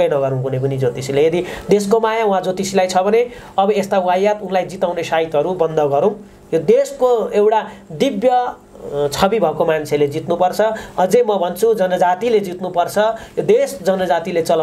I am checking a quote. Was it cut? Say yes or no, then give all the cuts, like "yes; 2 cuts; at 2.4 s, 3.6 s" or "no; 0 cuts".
no; 0 cuts